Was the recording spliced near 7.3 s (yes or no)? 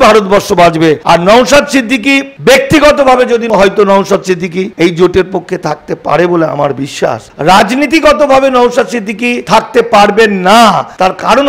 yes